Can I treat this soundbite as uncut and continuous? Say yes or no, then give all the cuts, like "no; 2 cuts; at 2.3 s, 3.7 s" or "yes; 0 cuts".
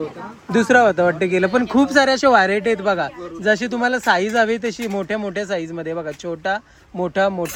yes; 0 cuts